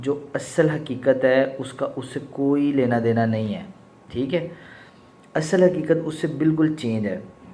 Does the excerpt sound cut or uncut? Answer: uncut